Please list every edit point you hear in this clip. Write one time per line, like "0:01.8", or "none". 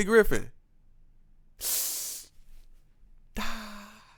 none